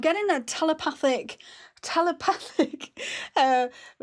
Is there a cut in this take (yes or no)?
no